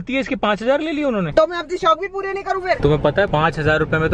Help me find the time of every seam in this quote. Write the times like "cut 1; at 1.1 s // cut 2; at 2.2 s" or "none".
cut 1; at 1.3 s // cut 2; at 2.8 s